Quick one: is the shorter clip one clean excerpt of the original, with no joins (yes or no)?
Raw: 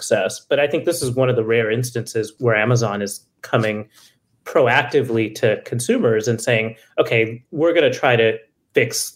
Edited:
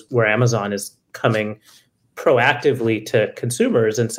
yes